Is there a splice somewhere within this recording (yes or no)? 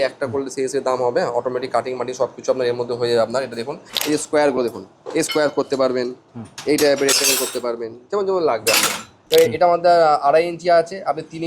yes